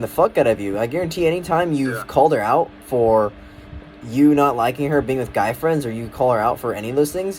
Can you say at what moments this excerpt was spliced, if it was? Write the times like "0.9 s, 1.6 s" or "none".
none